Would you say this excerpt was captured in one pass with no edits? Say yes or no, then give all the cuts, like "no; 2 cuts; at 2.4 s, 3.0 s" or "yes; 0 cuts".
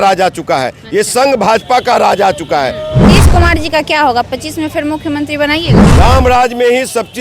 no; 2 cuts; at 3.1 s, 5.8 s